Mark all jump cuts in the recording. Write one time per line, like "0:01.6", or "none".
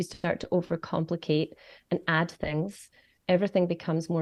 none